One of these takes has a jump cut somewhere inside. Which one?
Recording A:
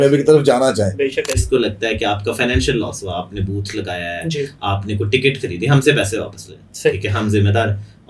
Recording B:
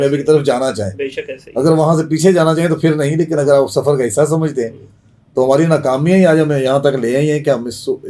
A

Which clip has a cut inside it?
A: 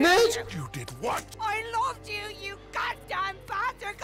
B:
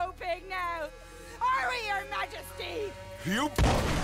A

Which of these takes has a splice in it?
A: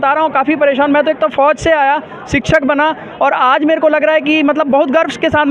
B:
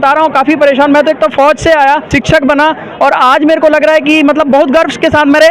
B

